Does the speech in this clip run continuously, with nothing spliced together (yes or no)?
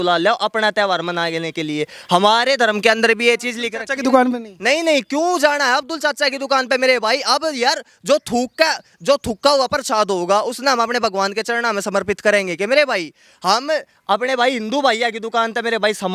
yes